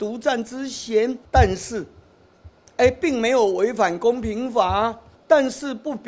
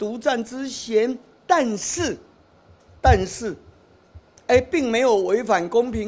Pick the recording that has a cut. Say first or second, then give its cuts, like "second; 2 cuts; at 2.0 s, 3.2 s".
first; 2 cuts; at 1.2 s, 5.1 s